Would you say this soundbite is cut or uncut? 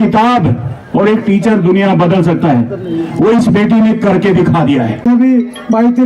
cut